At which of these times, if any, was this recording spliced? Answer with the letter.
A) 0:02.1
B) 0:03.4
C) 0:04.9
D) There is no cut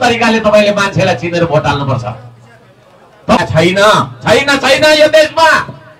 B